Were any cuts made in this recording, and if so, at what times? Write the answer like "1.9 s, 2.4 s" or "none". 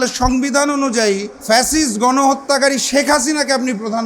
1.3 s